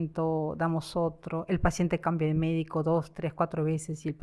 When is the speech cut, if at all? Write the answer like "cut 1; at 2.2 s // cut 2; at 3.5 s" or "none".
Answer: none